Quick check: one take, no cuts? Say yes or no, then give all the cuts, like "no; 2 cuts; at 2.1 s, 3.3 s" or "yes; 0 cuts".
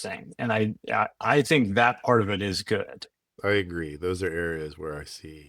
no; 1 cut; at 3.3 s